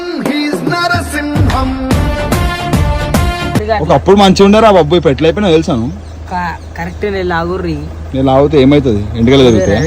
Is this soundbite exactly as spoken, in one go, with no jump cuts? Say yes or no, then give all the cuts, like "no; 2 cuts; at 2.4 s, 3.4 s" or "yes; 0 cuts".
no; 1 cut; at 3.6 s